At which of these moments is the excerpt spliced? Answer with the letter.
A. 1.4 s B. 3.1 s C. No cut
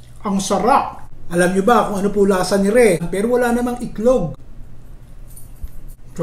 B